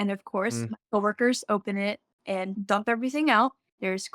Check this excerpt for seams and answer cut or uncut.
cut